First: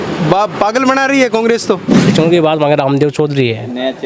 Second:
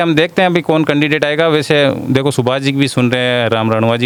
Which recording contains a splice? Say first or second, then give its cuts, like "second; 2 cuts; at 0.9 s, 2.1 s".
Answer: first; 1 cut; at 2.0 s